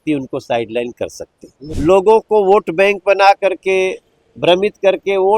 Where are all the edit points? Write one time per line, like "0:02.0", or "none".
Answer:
0:01.6

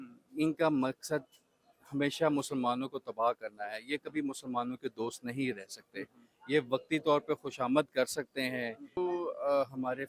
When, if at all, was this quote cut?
0:09.0

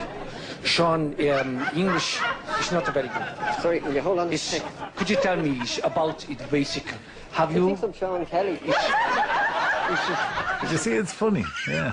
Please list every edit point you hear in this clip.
0:07.5

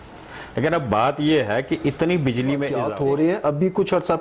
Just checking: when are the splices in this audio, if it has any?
0:02.7

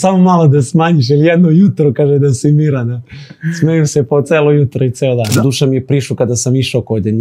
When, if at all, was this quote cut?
0:05.3

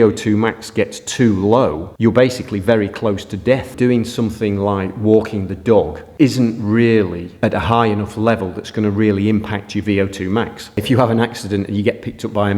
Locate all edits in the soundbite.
0:03.7
0:10.8

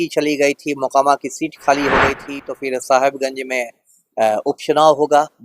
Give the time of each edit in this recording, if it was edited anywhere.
0:02.4

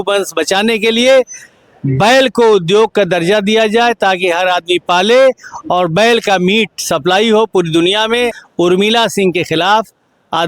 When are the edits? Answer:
0:08.4

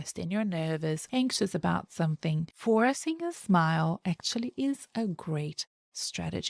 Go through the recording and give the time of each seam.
0:01.0
0:02.5

